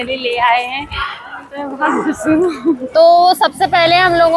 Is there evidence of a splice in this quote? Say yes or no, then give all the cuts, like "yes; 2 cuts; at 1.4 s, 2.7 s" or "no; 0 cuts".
yes; 1 cut; at 2.8 s